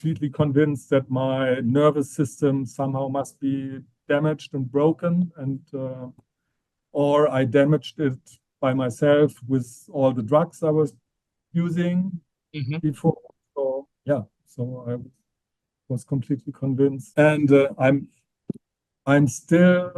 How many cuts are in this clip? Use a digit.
1